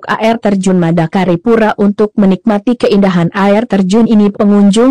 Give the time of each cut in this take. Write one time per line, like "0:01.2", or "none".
0:02.4